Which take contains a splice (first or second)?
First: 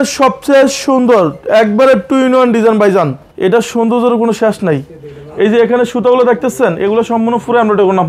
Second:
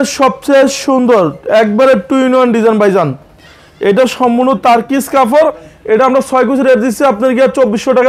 first